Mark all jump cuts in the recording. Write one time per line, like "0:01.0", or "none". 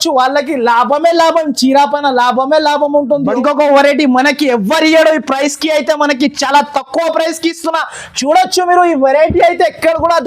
0:03.4

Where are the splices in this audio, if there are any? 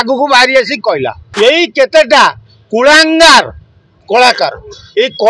0:01.2

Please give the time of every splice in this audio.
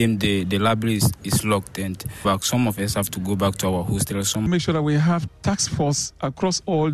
0:02.2
0:04.4

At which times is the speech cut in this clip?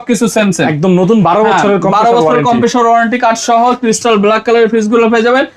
none

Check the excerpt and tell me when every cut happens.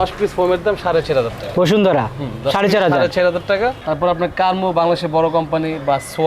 0:03.8

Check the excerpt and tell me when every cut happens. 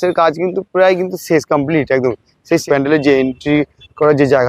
0:02.6

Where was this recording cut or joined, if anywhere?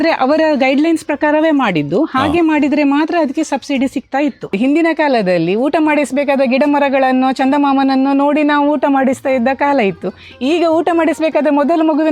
0:04.5

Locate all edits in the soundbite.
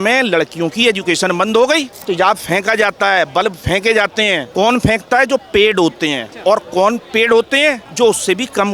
0:02.0
0:04.4
0:06.3
0:07.9

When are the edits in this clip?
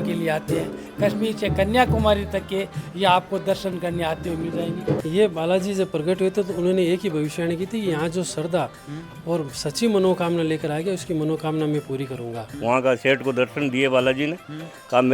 0:05.0
0:12.5

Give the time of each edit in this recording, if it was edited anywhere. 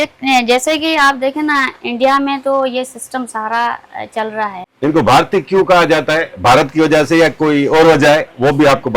0:04.7

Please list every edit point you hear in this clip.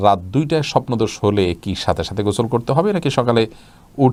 none

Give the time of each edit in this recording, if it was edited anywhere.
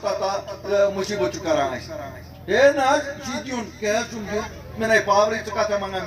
none

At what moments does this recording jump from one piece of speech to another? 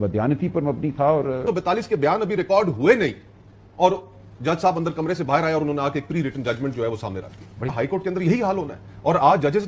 0:01.4
0:07.7

